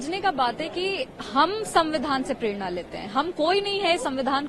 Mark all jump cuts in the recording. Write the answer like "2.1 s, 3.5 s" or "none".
none